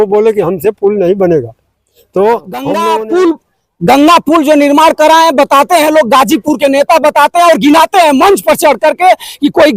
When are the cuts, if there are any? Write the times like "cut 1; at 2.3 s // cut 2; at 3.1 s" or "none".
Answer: cut 1; at 2.9 s